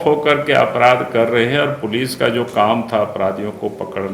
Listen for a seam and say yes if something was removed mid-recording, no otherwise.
no